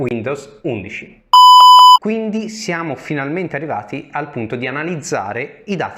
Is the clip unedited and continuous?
no; 1 cut; at 2.0 s

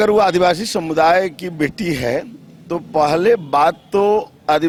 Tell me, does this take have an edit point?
no; 0 cuts

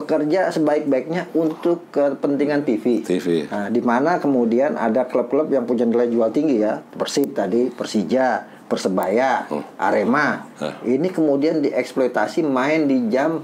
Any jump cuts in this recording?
no; 0 cuts

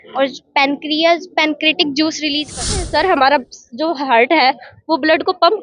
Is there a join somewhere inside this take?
yes; 1 cut; at 2.9 s

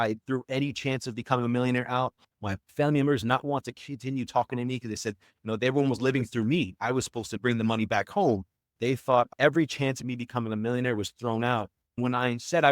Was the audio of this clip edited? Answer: yes; 1 cut; at 8.7 s

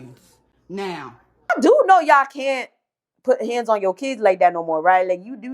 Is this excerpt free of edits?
no; 1 cut; at 1.5 s

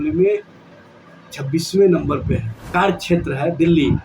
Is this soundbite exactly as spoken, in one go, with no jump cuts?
no; 1 cut; at 2.6 s

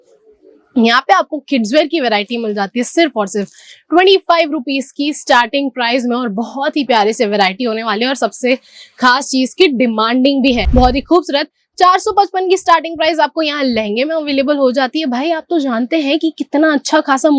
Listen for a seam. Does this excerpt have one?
yes; 1 cut; at 10.7 s

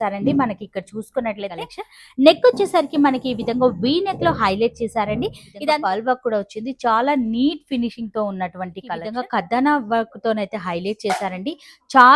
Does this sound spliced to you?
yes; 3 cuts; at 1.8 s, 5.5 s, 9.0 s

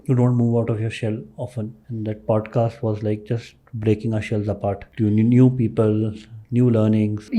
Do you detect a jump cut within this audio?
no; 0 cuts

